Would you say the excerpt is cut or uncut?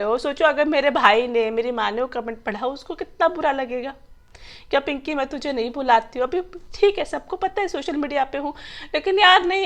uncut